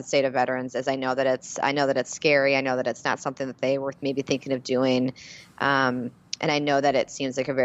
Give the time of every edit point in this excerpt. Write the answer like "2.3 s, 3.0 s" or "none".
none